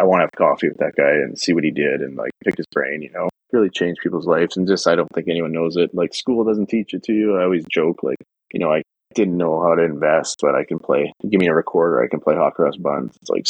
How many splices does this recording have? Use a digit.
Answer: 1